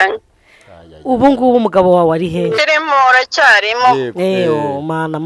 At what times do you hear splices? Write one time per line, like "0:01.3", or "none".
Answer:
0:02.6